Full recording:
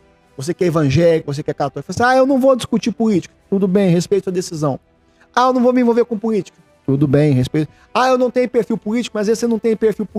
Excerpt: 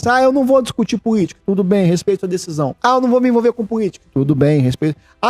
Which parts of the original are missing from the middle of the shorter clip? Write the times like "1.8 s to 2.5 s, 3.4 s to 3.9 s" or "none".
3.3 s to 3.4 s, 4.8 s to 5.3 s, 6.5 s to 6.7 s